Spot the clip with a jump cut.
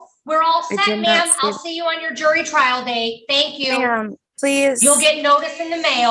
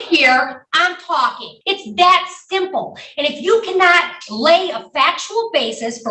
second; 1 cut; at 1.5 s

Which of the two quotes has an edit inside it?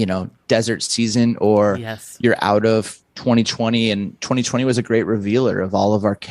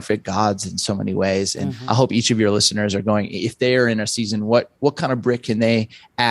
second; 1 cut; at 1.7 s

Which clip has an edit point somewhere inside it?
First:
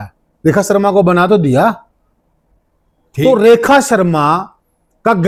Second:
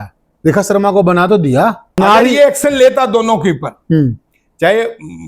second; 1 cut; at 2.0 s

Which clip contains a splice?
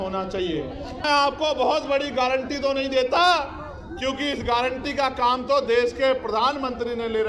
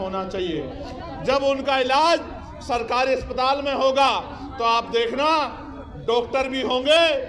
first; 1 cut; at 1.0 s

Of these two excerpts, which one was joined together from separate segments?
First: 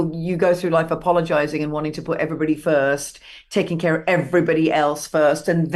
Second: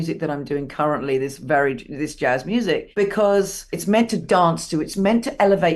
second; 2 cuts; at 2.9 s, 3.7 s

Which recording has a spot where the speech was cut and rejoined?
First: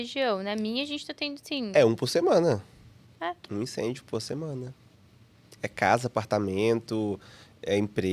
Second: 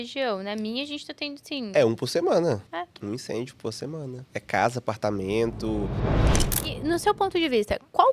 second; 3 cuts; at 2.7 s, 4.2 s, 6.3 s

